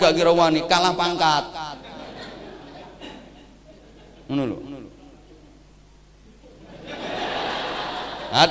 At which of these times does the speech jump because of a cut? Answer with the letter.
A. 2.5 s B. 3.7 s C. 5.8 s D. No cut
D